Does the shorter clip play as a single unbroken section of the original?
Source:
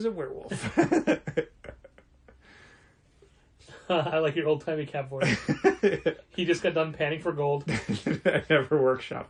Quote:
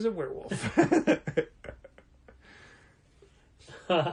yes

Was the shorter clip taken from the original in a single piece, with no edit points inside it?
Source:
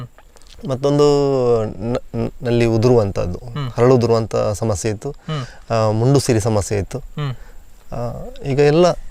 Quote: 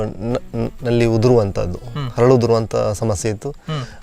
yes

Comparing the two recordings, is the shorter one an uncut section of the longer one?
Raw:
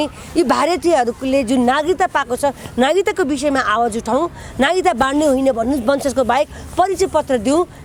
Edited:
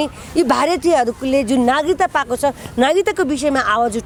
yes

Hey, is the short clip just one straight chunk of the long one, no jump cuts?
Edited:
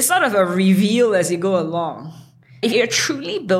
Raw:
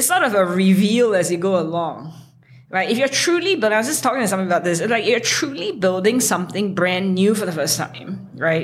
no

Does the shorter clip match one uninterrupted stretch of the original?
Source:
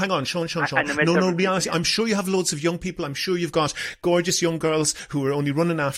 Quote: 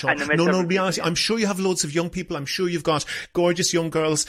yes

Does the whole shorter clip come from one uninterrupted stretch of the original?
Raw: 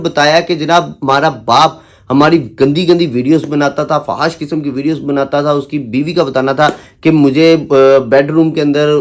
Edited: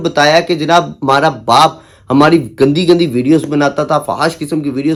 yes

